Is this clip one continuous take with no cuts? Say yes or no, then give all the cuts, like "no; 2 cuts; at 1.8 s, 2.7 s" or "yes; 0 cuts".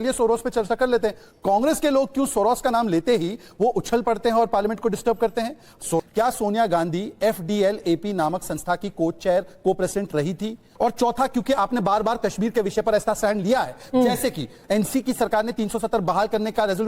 no; 3 cuts; at 4.5 s, 6.0 s, 10.7 s